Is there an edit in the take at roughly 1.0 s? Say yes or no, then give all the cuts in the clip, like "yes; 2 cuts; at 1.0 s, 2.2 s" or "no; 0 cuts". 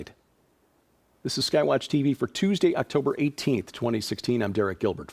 yes; 1 cut; at 1.0 s